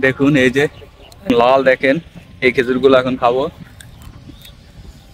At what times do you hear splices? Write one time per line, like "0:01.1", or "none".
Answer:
0:01.3

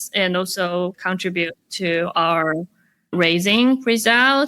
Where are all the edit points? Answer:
0:01.0

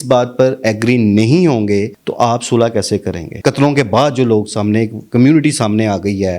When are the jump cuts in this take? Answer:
0:03.2

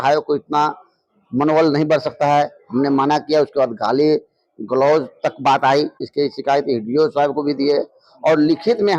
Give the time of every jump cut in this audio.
0:06.0

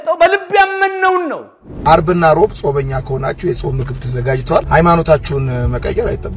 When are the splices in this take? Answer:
0:01.8

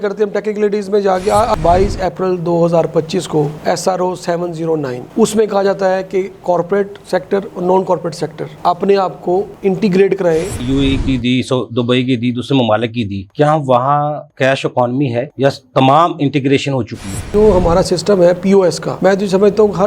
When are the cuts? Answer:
0:01.6
0:10.5
0:13.2
0:17.2

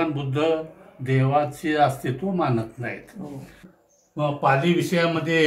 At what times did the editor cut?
0:03.7

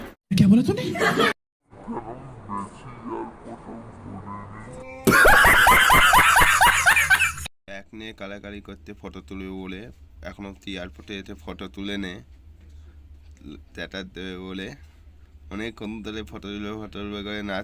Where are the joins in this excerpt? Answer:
0:07.5

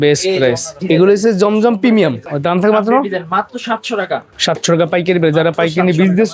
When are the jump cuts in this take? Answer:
0:00.8
0:02.3
0:04.3

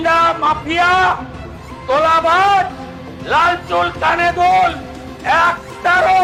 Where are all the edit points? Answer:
none

